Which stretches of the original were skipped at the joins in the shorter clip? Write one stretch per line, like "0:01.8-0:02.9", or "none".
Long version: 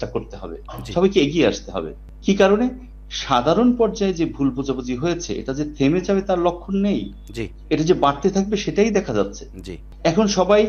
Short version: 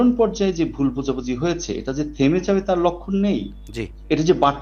none